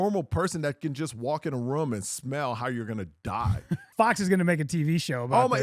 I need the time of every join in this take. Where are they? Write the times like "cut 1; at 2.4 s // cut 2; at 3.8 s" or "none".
cut 1; at 3.9 s

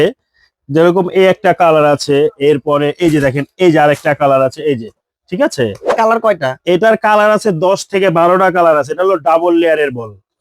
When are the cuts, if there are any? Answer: cut 1; at 5.9 s

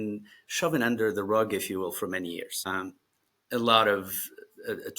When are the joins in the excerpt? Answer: cut 1; at 2.7 s

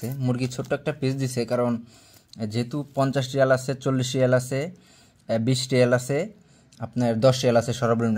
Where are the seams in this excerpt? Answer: none

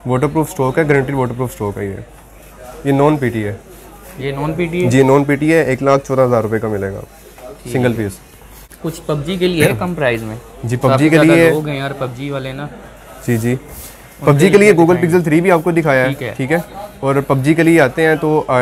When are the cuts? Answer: none

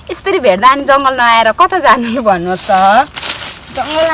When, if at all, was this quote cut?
none

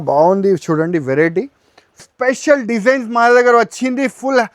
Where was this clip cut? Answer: cut 1; at 2.0 s

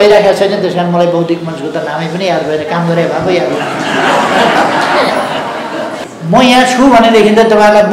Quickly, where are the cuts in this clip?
cut 1; at 6.0 s

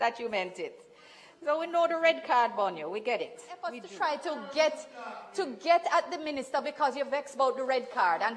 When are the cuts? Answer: cut 1; at 3.8 s

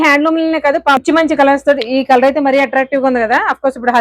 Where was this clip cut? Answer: cut 1; at 1.0 s

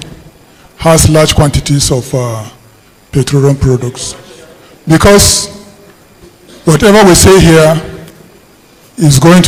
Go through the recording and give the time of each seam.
none

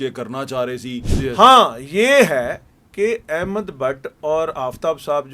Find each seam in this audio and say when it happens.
cut 1; at 1.1 s

